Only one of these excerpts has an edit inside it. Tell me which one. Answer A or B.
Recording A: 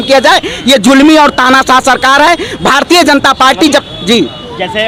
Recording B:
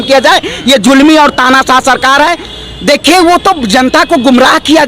B